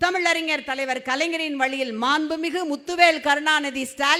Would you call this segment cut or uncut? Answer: uncut